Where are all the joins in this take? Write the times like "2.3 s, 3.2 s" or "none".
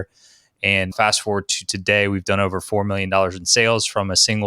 0.9 s